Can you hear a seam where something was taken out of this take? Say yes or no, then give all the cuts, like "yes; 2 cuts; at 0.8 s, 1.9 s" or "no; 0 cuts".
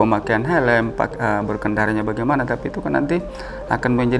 no; 0 cuts